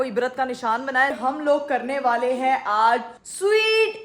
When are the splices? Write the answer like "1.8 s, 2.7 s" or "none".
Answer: 1.1 s